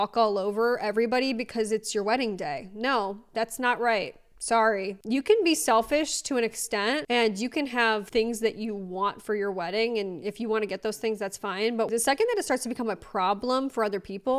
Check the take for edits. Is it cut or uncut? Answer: uncut